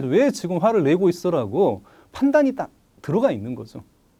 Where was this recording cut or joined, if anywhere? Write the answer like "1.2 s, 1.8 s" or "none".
none

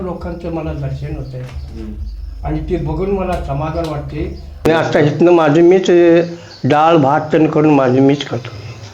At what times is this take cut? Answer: 4.7 s

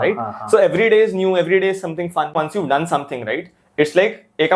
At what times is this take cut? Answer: 2.4 s

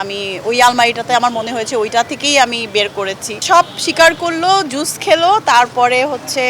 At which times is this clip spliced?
3.3 s

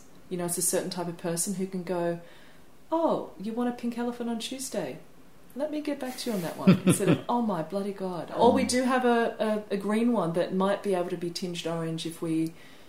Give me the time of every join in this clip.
8.3 s

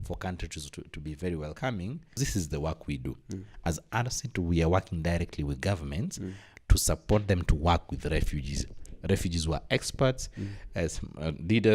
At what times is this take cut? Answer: 2.2 s

